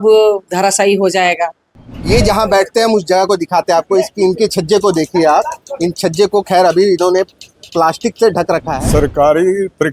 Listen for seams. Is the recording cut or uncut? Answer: cut